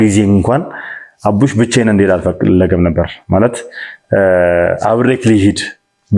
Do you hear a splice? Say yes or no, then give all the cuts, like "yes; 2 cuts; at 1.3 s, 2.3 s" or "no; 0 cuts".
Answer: no; 0 cuts